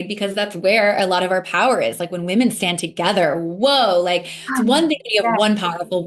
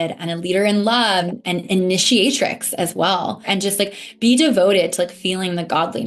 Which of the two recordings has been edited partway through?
second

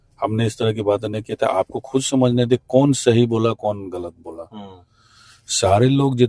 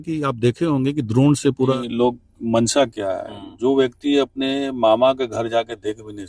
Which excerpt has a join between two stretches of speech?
second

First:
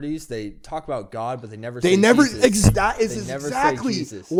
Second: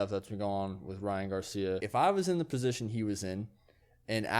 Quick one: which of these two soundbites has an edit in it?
second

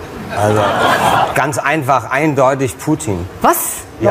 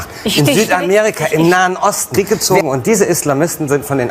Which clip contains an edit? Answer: second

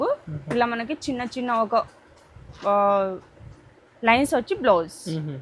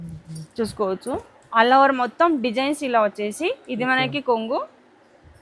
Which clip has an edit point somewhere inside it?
second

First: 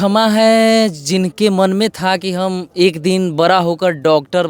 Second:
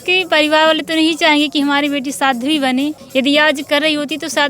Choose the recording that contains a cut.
second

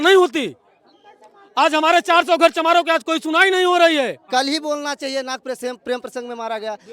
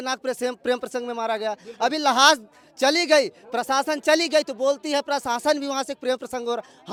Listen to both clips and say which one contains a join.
first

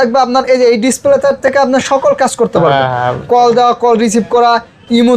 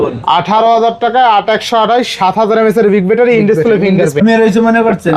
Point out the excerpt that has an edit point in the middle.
second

